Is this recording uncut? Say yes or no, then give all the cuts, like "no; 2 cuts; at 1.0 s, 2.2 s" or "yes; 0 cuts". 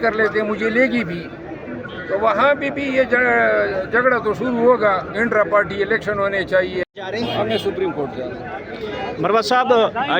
no; 1 cut; at 6.9 s